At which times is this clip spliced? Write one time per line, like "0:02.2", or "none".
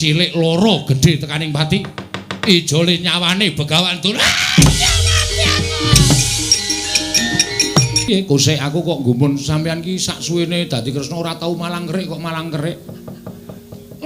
0:08.1